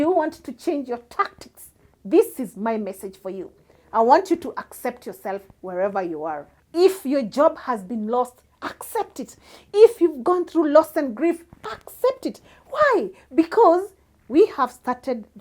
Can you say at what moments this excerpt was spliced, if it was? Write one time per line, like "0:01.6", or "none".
0:06.5